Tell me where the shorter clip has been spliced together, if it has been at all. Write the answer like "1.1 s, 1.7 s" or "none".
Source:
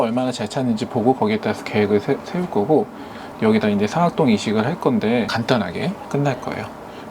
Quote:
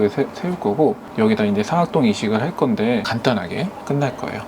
1.1 s